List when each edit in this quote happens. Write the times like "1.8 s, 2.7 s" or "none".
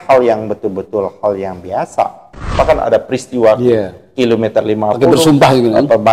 2.5 s